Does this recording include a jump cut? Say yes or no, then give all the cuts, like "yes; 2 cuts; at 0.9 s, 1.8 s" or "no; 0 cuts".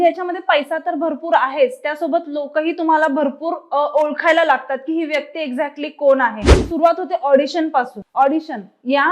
yes; 1 cut; at 6.5 s